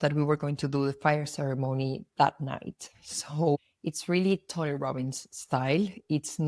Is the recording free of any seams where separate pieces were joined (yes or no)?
yes